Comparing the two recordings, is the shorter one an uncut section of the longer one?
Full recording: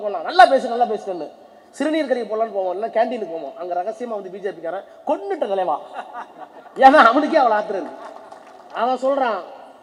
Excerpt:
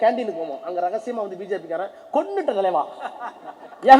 yes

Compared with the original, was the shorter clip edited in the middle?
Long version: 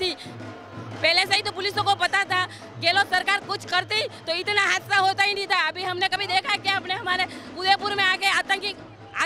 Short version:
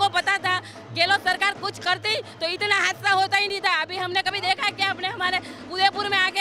no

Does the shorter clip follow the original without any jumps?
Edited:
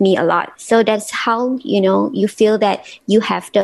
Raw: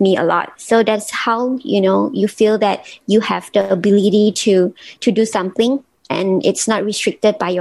yes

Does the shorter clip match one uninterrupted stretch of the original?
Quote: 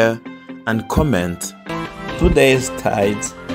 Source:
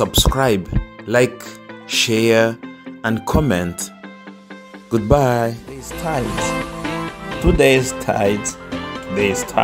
no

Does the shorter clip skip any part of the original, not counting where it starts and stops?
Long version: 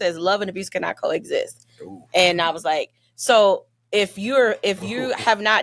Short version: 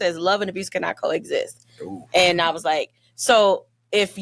no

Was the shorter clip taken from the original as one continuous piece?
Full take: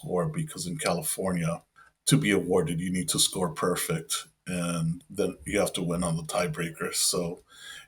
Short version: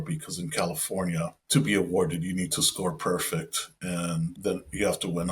no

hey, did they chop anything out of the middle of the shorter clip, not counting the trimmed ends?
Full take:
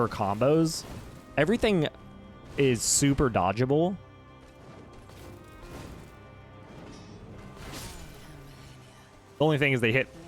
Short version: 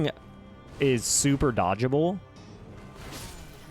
yes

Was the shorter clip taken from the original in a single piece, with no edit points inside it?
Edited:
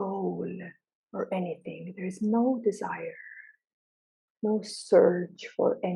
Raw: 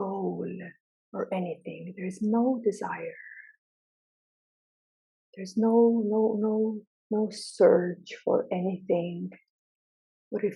no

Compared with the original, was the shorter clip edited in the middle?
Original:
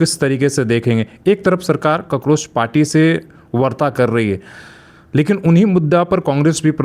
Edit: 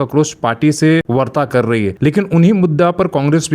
yes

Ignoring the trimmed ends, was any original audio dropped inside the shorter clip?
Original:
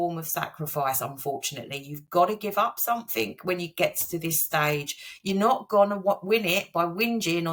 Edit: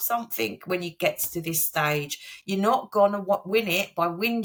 no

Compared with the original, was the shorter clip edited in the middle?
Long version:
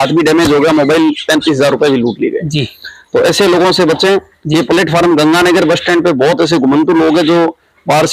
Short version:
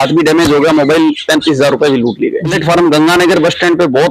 yes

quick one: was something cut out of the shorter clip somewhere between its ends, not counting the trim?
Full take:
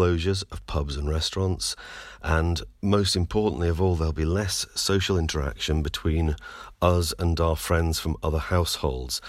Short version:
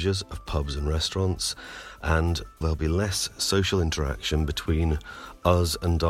yes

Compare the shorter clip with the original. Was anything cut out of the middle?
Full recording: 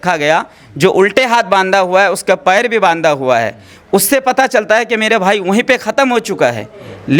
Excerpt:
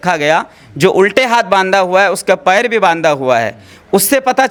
no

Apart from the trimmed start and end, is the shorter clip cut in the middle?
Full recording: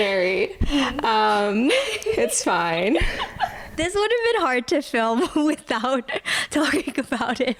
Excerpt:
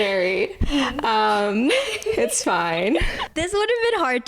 yes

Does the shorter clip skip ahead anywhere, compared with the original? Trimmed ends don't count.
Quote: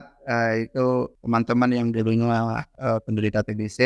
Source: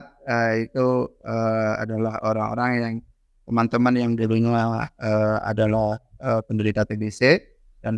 yes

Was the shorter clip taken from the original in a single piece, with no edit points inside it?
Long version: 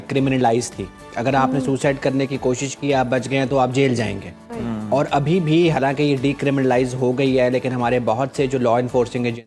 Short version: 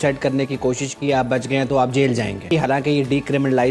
no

